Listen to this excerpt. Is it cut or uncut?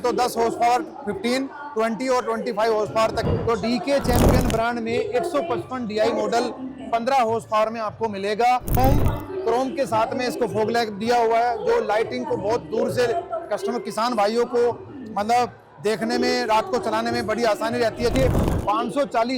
cut